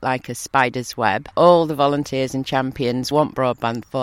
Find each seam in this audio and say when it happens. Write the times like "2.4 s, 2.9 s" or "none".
1.3 s, 3.1 s